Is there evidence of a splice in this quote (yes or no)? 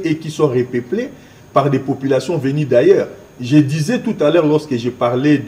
no